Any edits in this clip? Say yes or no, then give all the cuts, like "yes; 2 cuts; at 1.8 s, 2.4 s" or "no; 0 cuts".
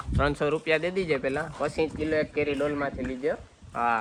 no; 0 cuts